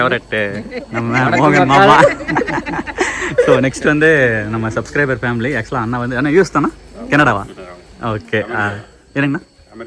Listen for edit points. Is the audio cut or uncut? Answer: uncut